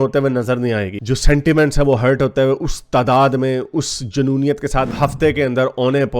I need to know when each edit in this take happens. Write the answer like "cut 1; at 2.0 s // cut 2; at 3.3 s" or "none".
cut 1; at 1.0 s // cut 2; at 4.9 s